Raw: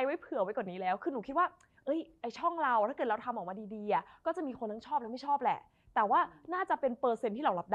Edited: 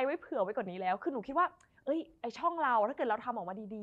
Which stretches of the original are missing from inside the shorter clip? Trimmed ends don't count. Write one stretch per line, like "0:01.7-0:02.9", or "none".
none